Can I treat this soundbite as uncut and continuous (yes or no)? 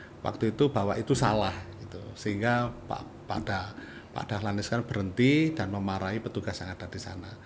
yes